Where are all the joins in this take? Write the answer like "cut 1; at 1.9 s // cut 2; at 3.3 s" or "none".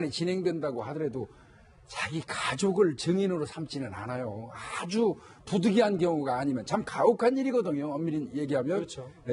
cut 1; at 3.0 s